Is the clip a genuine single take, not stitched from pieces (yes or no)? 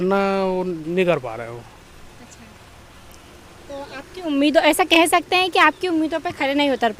yes